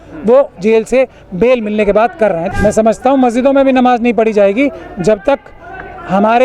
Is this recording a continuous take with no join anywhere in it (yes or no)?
no